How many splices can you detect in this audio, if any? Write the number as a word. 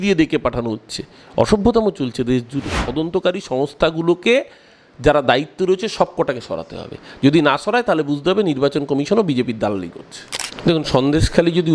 two